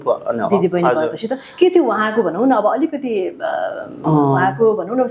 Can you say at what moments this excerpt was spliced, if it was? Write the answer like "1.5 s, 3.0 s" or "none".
none